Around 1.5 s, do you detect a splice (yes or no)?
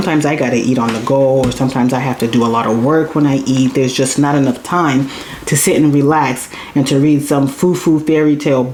no